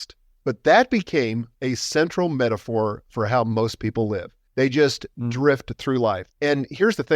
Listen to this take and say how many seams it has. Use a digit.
3